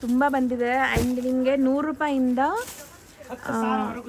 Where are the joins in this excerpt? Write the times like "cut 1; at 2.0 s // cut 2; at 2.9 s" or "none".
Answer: none

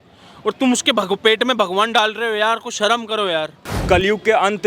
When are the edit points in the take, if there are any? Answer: cut 1; at 3.7 s

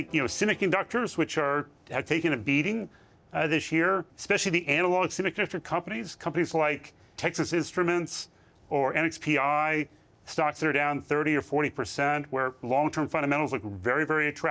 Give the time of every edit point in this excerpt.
cut 1; at 4.1 s // cut 2; at 7.1 s

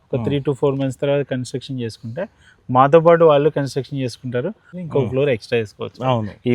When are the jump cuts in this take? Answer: cut 1; at 4.7 s

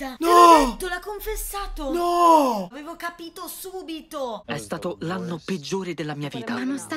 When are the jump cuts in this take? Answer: none

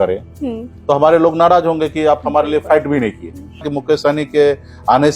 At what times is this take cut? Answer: cut 1; at 3.7 s

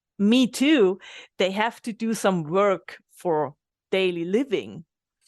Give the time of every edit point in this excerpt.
cut 1; at 3.7 s

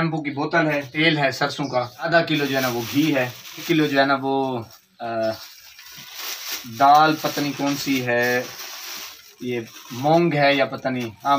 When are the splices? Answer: cut 1; at 0.9 s // cut 2; at 2.1 s // cut 3; at 3.6 s

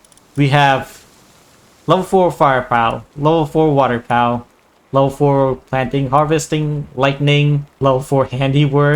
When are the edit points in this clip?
cut 1; at 7.8 s

